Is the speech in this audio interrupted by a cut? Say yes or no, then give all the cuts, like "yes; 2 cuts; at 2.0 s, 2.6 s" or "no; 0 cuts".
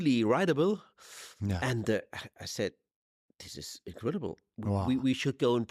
no; 0 cuts